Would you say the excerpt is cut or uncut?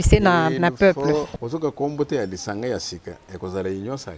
cut